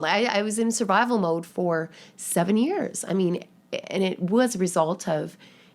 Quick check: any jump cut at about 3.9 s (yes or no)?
no